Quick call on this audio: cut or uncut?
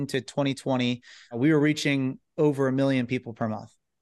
cut